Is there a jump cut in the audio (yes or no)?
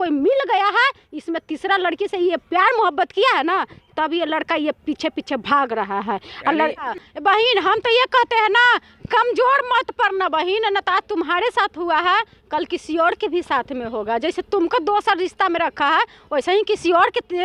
yes